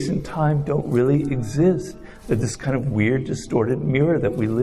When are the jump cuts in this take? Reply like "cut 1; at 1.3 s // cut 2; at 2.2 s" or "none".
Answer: none